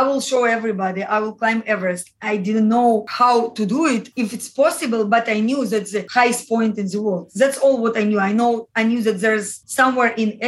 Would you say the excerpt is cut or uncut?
uncut